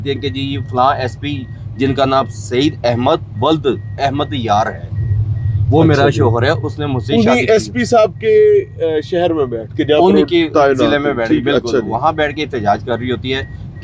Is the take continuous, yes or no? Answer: yes